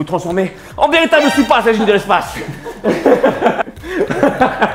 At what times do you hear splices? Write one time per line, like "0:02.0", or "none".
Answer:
0:03.7